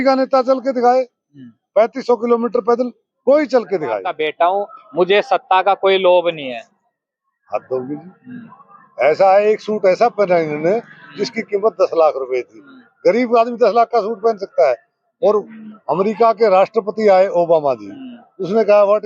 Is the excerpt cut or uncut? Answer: cut